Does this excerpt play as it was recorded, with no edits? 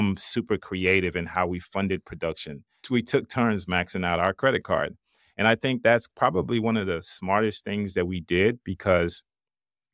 no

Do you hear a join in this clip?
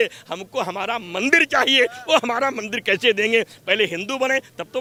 no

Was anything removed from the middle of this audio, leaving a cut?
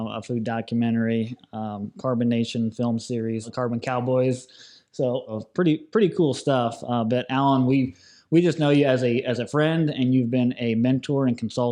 yes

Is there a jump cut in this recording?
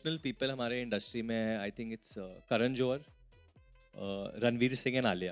no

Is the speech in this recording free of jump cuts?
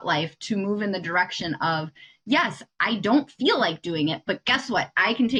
yes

